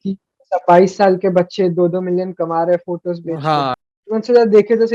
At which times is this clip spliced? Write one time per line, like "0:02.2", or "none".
0:03.8